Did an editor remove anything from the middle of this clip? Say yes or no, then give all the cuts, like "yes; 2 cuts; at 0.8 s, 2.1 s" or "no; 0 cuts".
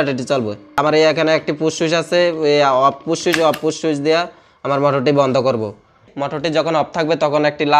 yes; 2 cuts; at 0.8 s, 6.1 s